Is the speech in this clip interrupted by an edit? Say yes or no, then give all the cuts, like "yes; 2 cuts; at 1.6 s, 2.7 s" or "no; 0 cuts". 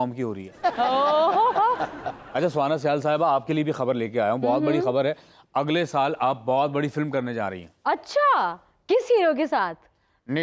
no; 0 cuts